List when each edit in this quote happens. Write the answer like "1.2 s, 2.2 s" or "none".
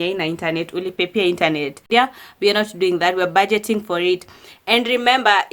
1.9 s